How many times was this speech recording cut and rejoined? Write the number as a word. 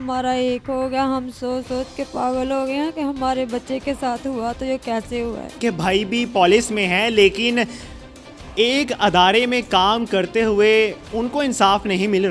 one